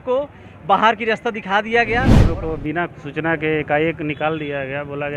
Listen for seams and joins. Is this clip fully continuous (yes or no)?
no